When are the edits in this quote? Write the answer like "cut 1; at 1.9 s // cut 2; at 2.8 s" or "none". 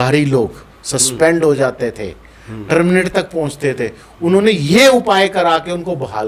none